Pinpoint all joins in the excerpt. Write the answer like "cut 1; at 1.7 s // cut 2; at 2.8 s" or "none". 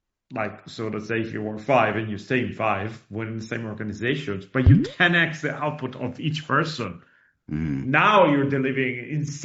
none